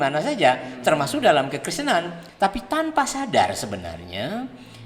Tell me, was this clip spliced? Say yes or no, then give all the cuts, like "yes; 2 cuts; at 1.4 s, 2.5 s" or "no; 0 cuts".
yes; 1 cut; at 2.2 s